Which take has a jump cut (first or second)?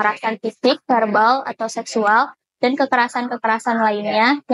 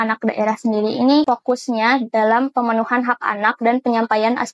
second